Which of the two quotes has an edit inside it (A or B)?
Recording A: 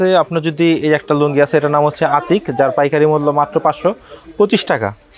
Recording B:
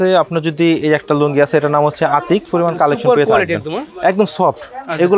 B